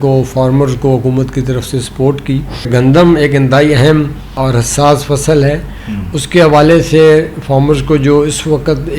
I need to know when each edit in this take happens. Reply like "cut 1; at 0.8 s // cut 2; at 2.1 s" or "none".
cut 1; at 2.7 s // cut 2; at 4.3 s